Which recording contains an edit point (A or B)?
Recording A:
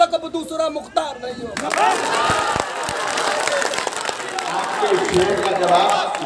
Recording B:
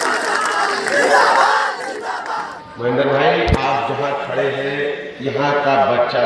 B